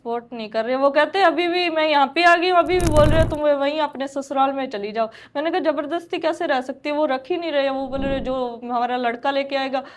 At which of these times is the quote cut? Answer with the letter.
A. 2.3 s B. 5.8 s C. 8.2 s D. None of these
D